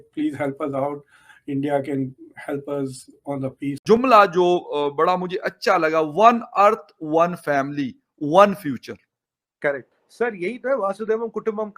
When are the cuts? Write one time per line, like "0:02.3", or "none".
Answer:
0:04.0
0:10.0